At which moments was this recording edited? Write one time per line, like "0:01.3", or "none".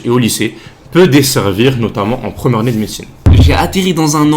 0:03.3